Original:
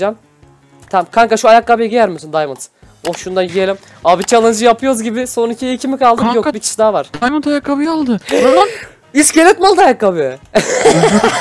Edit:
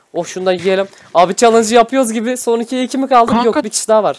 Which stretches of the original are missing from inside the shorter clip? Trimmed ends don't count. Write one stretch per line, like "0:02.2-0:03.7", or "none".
none